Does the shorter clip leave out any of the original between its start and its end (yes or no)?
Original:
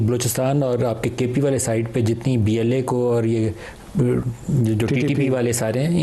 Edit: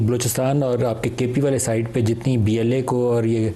no